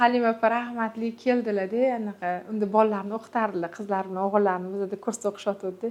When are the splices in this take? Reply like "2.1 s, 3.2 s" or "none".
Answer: none